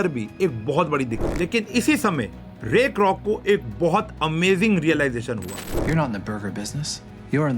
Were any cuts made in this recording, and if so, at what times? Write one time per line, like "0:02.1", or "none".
0:01.2
0:05.7